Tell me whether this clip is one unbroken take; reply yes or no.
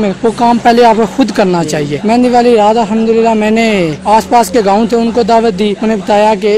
no